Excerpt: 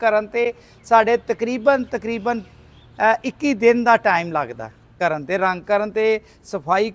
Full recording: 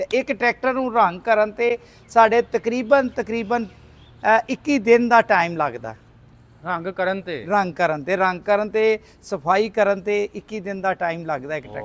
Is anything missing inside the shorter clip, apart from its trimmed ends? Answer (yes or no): yes